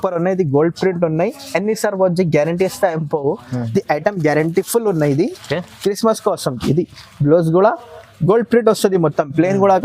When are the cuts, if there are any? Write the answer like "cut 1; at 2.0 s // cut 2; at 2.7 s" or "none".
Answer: none